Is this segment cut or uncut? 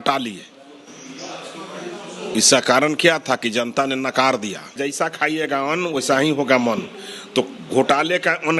cut